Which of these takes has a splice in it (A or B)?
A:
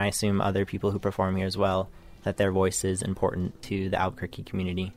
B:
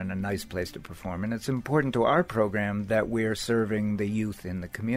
A